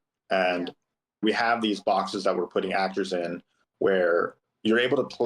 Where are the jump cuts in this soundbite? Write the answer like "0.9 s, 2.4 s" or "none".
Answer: 1.2 s